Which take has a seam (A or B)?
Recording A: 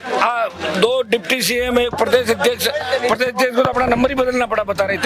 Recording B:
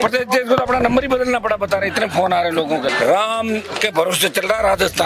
B